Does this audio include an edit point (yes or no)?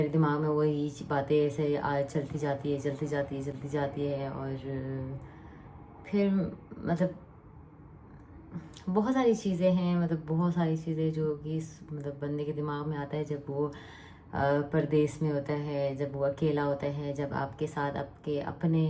no